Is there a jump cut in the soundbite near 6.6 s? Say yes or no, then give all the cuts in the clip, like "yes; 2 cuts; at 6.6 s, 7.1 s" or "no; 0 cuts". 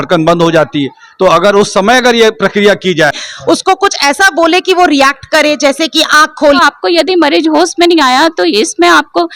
yes; 2 cuts; at 3.3 s, 6.6 s